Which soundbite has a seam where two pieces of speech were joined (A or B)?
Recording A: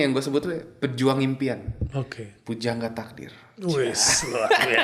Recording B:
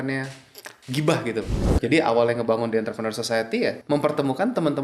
B